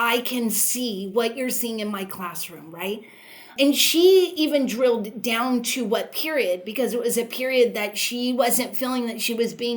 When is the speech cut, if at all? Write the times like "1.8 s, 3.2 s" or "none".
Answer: 3.5 s